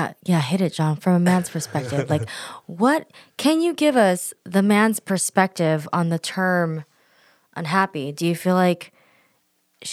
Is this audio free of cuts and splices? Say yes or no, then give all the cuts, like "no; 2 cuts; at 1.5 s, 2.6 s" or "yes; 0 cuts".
yes; 0 cuts